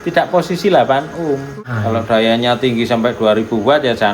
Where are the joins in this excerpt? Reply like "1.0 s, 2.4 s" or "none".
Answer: 1.5 s